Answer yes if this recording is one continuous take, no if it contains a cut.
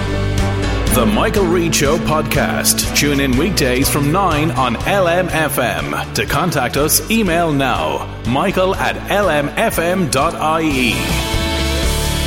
yes